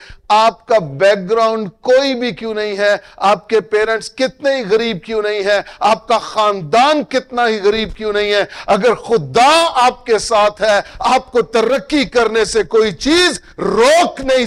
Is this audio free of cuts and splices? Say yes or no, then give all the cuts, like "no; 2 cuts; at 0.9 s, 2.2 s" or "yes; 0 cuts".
yes; 0 cuts